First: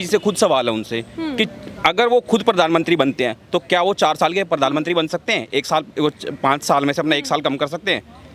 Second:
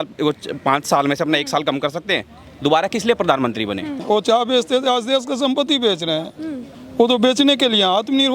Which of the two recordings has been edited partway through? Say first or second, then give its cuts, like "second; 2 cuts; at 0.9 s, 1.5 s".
second; 1 cut; at 4.0 s